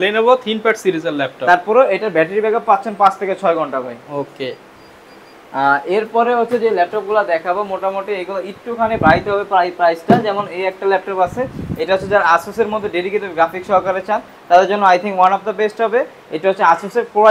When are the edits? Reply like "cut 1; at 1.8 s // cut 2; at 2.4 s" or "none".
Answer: none